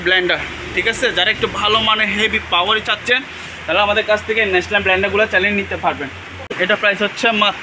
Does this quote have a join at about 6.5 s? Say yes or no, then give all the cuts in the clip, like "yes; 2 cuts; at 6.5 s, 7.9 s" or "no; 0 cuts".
yes; 1 cut; at 6.5 s